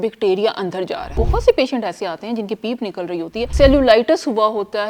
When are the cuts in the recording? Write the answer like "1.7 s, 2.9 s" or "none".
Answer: 1.1 s, 3.5 s